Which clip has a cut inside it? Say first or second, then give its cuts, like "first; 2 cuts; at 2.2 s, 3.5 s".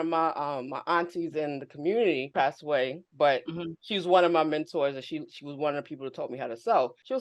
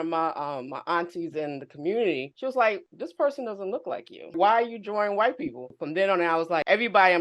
second; 2 cuts; at 2.3 s, 4.3 s